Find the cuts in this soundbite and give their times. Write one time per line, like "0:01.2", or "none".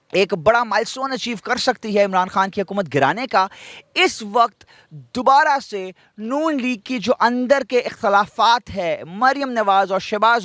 none